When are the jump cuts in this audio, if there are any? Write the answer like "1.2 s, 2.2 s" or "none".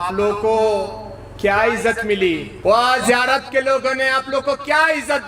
2.5 s